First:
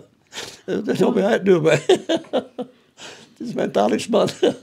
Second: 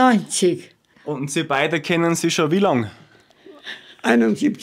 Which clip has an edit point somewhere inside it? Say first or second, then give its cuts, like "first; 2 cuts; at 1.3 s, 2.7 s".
second; 1 cut; at 0.9 s